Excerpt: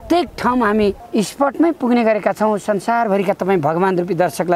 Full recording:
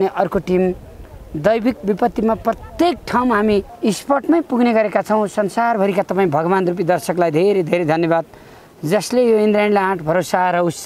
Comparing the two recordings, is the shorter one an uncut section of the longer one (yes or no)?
yes